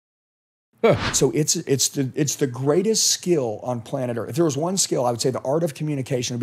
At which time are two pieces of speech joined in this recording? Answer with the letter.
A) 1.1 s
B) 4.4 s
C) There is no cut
A